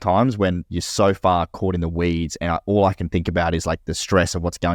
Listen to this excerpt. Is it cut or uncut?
uncut